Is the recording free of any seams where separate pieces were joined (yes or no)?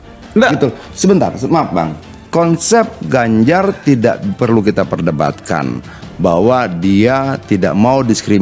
no